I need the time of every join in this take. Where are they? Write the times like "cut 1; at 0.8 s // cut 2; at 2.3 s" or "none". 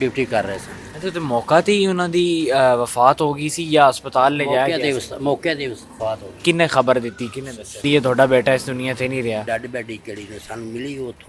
cut 1; at 6.4 s // cut 2; at 7.8 s // cut 3; at 9.4 s